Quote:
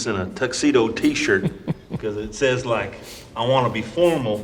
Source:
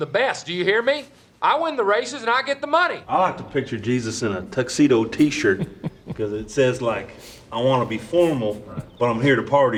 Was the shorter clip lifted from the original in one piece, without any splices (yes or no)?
yes